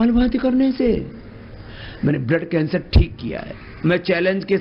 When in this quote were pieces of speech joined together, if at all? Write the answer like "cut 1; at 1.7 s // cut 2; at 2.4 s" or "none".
cut 1; at 2.7 s